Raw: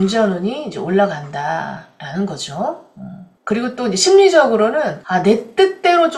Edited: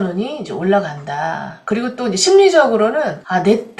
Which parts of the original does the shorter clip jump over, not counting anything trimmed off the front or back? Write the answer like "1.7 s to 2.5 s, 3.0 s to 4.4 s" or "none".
1.8 s to 3.3 s